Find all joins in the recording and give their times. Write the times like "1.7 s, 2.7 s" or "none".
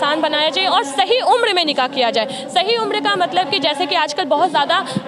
none

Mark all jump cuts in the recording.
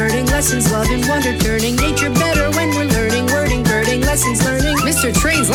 none

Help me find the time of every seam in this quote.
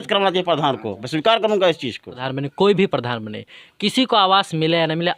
2.2 s

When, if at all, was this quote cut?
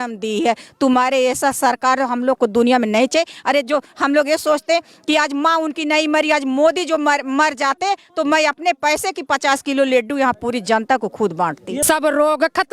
11.8 s

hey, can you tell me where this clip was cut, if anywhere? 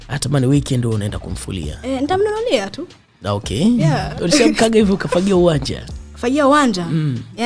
4.1 s

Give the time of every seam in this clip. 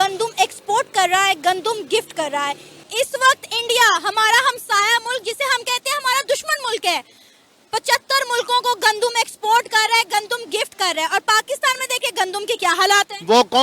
none

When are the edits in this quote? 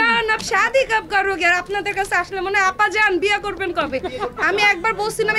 4.3 s

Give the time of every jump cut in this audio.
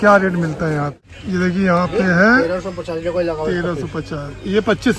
none

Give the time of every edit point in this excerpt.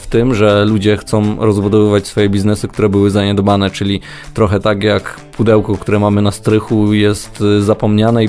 none

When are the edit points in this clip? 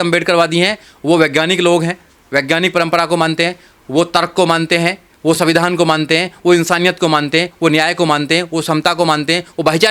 none

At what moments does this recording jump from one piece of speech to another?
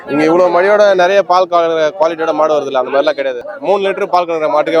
3.5 s

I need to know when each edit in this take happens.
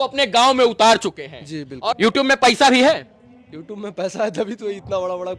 1.8 s

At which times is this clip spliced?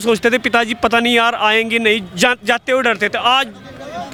none

